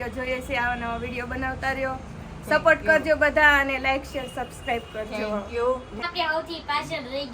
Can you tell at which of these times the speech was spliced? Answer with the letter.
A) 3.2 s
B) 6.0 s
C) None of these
B